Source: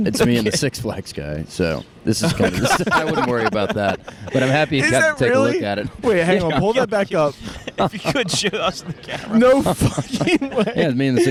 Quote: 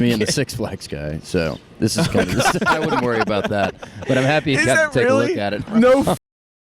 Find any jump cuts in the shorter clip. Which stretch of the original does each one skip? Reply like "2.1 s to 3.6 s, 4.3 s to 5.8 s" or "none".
5.9 s to 9.2 s